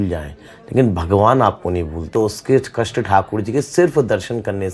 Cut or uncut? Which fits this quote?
cut